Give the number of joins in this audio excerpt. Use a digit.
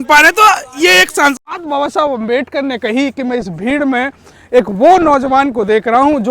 1